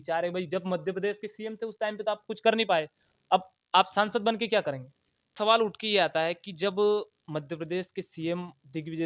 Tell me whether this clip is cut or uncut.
cut